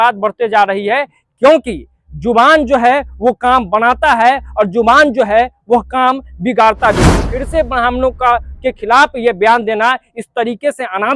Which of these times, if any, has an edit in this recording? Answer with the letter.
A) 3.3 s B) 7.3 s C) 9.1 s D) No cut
B